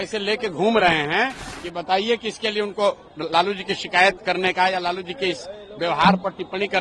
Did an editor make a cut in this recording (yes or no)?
no